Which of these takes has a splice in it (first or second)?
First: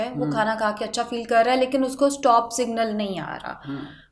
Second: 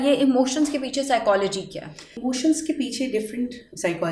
second